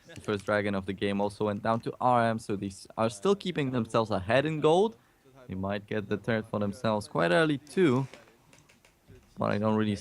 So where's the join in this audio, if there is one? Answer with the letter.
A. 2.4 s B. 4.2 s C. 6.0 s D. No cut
A